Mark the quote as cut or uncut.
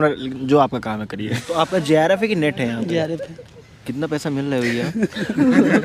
cut